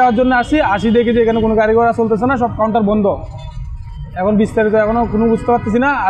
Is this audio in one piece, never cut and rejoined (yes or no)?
yes